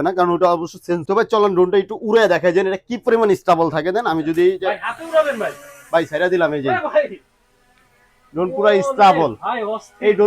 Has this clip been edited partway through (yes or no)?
yes